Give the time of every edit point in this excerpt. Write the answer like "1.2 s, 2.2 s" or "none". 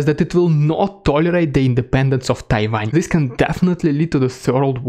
2.8 s